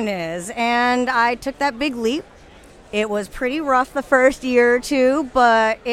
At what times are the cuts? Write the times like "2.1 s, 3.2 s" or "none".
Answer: none